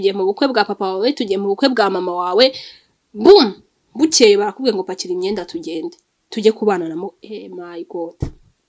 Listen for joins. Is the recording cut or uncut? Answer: uncut